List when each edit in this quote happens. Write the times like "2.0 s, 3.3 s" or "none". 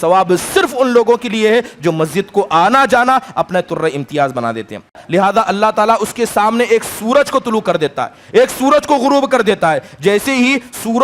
5.0 s